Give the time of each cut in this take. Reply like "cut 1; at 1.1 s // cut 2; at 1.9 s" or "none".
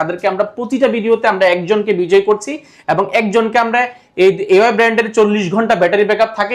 none